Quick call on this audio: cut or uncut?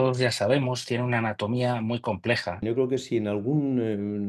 cut